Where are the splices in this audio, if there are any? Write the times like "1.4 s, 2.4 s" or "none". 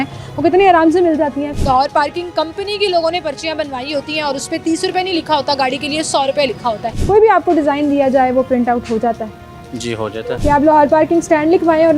1.5 s, 6.9 s, 10.1 s

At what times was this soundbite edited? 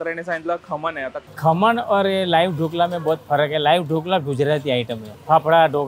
1.2 s

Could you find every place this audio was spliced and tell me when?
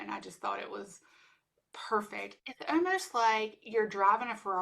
2.4 s

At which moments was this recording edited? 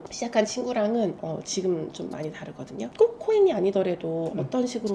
2.9 s

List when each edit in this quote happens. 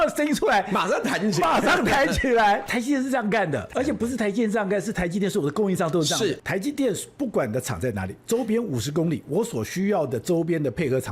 2.7 s, 3.7 s, 6.4 s

